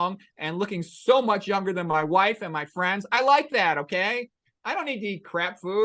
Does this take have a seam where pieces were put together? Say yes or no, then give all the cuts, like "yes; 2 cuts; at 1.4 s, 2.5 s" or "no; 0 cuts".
no; 0 cuts